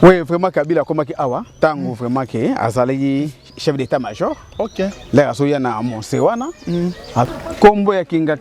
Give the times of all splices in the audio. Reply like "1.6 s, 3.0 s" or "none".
7.3 s